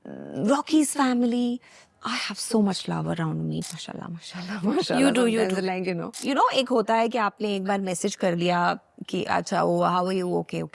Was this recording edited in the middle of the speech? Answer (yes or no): yes